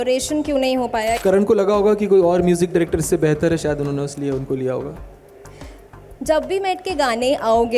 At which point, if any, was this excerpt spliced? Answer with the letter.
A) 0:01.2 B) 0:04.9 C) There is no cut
A